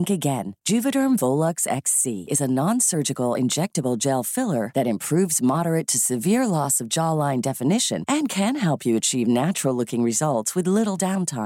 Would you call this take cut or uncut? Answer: uncut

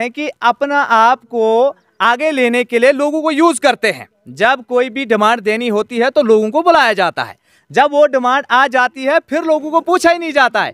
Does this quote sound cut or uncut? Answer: uncut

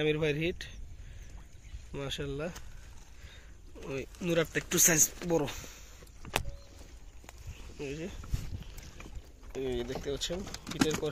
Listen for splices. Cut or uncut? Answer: uncut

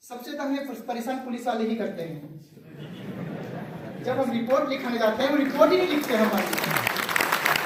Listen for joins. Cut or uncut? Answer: uncut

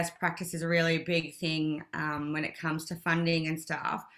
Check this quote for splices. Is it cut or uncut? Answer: uncut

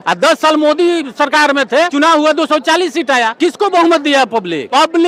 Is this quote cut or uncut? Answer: uncut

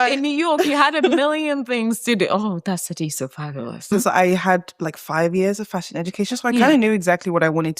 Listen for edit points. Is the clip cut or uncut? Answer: cut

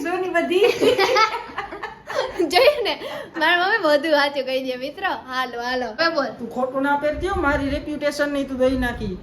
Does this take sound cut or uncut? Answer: cut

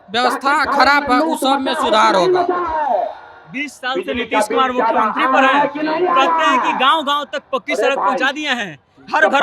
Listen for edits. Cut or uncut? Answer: uncut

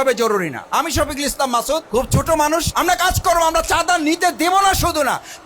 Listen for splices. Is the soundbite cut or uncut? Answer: cut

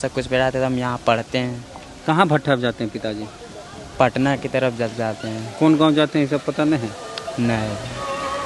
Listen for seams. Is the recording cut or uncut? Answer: uncut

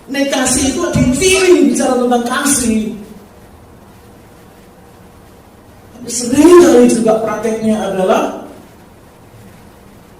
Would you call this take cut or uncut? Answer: cut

